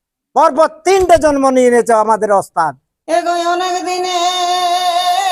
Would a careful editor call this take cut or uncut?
cut